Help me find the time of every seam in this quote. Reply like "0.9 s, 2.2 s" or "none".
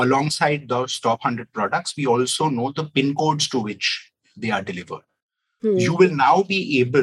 none

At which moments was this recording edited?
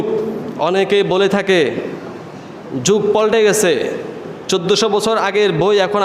none

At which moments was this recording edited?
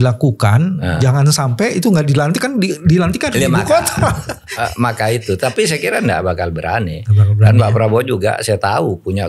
none

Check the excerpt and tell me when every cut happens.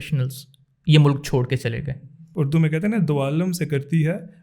2.2 s

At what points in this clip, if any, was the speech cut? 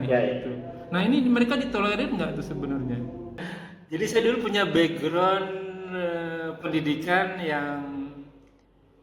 3.5 s

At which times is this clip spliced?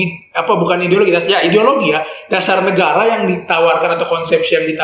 none

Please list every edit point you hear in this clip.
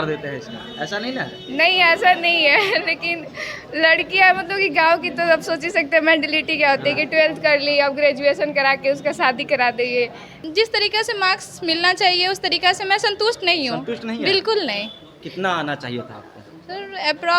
10.3 s

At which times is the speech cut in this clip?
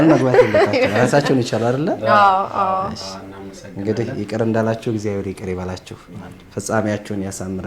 none

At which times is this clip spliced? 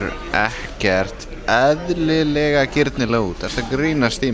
none

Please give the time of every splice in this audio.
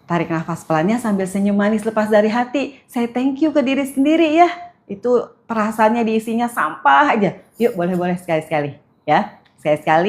1.8 s

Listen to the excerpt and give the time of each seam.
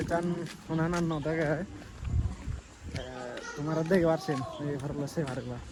none

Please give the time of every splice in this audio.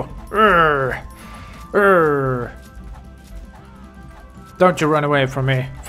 none

